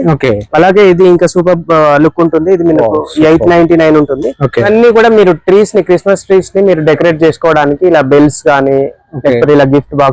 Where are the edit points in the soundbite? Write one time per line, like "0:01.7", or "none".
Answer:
0:04.7